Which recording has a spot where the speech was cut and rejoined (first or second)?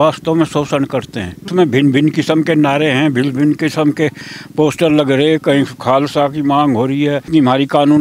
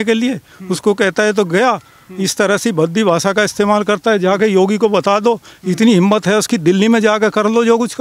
first